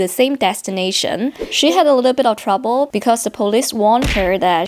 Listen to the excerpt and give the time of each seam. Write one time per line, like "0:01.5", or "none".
0:01.3